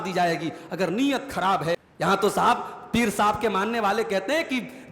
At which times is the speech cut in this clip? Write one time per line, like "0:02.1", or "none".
0:01.8